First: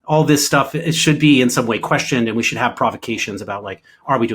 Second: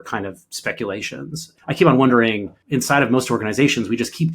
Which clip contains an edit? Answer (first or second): second